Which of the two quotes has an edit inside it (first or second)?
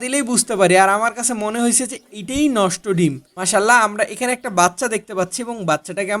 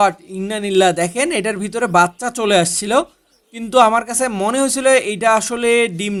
first